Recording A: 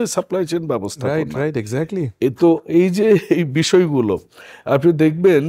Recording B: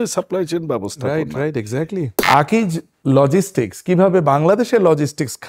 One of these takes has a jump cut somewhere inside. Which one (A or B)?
B